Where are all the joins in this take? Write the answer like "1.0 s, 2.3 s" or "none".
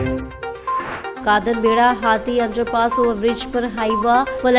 1.1 s